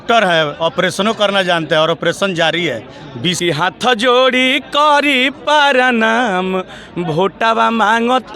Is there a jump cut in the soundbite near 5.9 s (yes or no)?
no